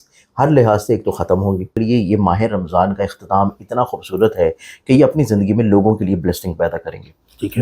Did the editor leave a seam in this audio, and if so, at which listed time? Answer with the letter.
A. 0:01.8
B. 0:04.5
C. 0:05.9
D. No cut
A